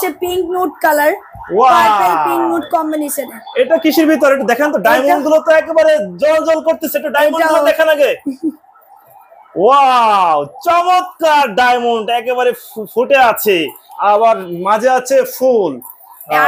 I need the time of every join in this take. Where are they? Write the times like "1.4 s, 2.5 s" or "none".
none